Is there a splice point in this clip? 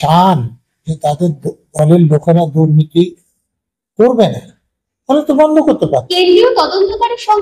yes; 1 cut; at 6.1 s

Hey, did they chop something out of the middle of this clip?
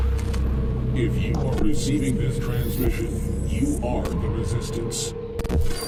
no; 0 cuts

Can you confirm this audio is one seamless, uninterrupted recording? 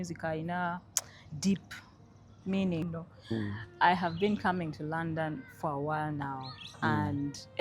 no; 1 cut; at 2.9 s

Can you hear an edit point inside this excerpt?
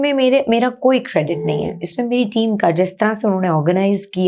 no; 0 cuts

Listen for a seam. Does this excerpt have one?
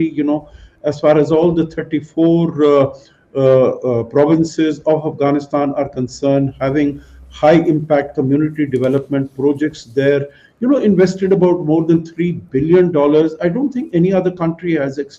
no; 0 cuts

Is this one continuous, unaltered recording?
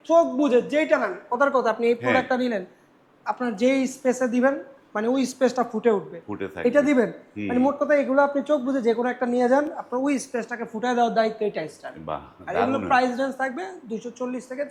yes; 0 cuts

